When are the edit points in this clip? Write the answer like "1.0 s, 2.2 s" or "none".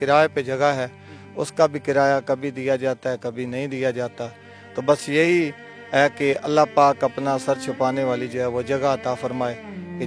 none